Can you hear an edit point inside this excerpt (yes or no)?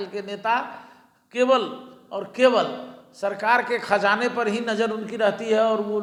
no